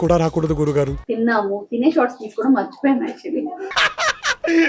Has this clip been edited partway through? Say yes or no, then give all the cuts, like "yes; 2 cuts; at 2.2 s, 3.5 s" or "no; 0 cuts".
yes; 1 cut; at 1.0 s